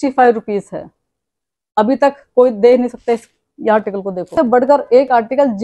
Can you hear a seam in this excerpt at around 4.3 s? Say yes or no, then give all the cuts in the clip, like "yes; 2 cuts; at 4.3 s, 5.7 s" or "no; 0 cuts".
yes; 1 cut; at 4.3 s